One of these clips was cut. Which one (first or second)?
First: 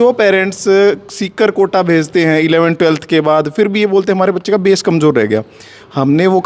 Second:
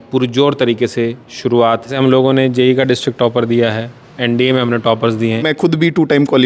second